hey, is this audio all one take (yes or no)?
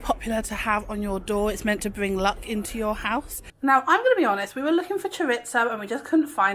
no